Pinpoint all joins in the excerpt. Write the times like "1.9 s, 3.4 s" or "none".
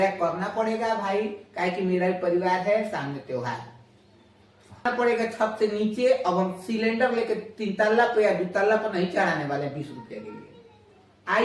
4.9 s